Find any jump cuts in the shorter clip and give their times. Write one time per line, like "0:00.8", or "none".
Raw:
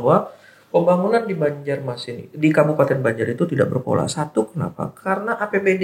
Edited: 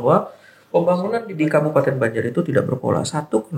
0:01.3